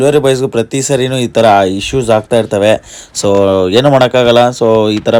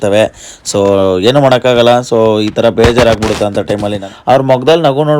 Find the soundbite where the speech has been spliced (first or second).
second